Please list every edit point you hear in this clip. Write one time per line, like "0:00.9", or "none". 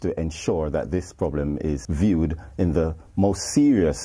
0:01.9

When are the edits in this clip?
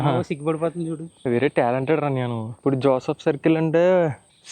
0:01.1
0:02.5

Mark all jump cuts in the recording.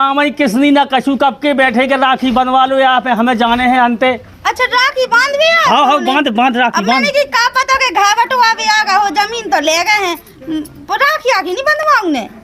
none

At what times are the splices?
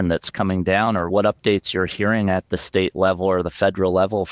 0:02.5

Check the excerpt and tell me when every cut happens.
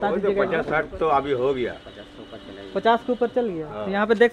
none

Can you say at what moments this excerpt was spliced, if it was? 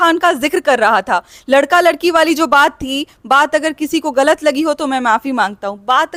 none

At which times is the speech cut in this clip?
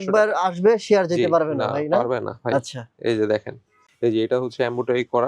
0:03.8

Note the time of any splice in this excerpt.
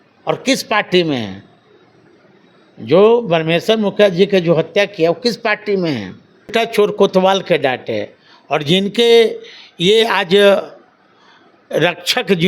0:06.5

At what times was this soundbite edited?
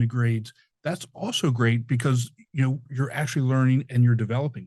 0:02.9
0:03.9

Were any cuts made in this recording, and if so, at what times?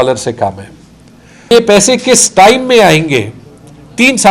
0:01.5

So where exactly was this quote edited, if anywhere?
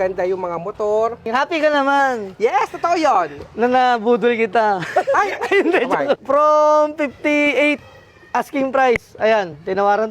0:01.2
0:06.2

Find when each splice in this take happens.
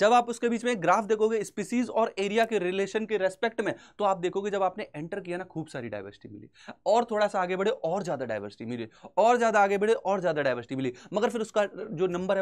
none

